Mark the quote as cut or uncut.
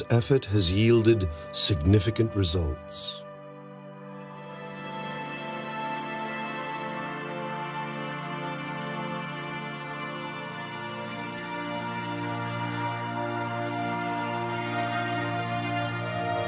uncut